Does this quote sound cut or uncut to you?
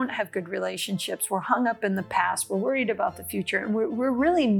uncut